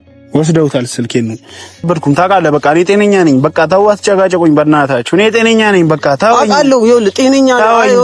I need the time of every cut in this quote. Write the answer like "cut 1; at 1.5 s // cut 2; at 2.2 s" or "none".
cut 1; at 1.9 s